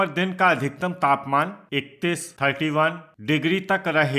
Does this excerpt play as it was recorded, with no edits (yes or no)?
no